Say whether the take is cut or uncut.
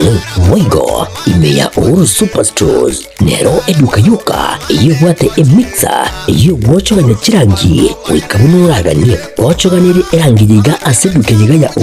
cut